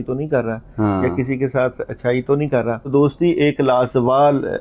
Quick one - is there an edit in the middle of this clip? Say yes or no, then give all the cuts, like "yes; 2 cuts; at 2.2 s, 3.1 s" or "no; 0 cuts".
yes; 1 cut; at 2.9 s